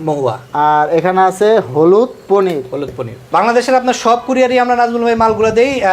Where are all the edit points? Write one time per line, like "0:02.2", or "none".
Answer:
0:03.2

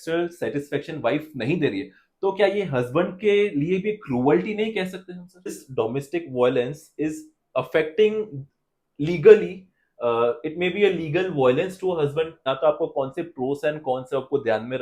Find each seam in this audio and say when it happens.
0:05.6
0:12.4

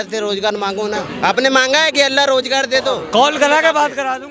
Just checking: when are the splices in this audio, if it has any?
0:01.1
0:03.0

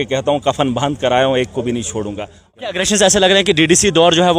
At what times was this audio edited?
0:02.6

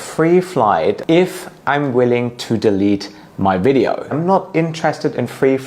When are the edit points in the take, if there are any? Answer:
0:01.0
0:04.2

